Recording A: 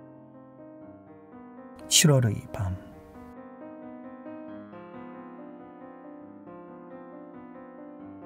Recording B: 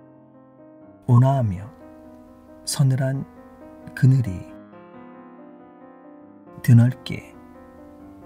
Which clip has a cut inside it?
B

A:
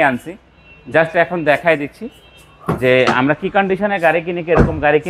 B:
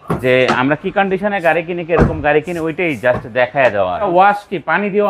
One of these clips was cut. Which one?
B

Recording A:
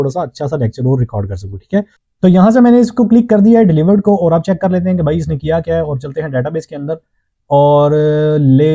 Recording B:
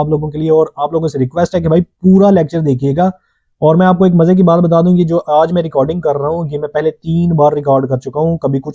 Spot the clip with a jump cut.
A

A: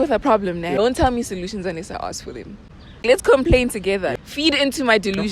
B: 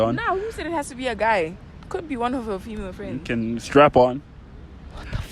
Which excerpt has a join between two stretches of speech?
A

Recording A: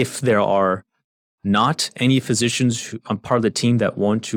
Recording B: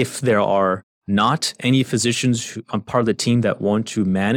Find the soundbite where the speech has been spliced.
B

